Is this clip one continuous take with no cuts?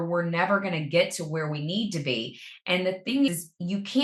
yes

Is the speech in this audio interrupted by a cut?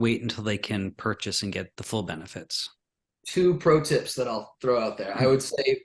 yes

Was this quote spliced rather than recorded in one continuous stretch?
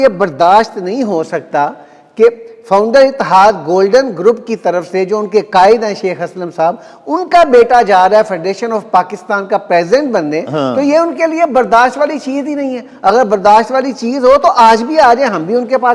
no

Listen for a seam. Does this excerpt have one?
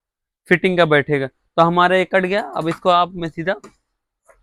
no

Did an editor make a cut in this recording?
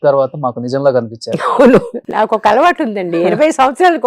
yes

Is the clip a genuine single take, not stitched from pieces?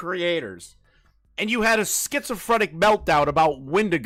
yes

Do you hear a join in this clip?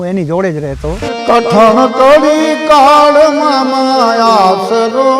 yes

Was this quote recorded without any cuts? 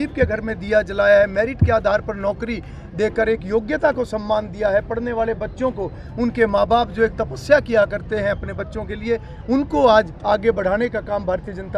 yes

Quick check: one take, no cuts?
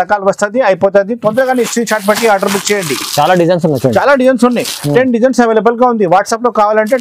yes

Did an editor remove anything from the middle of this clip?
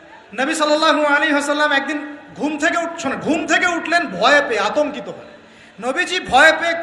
no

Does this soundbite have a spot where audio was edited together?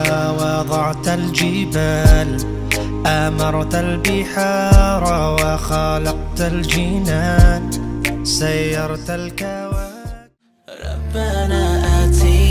no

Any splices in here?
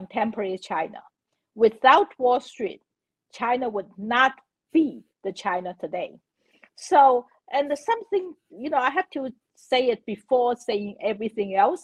no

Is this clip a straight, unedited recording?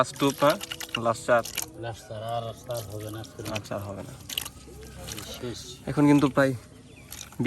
yes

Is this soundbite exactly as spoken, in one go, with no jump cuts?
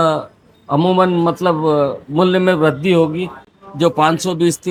yes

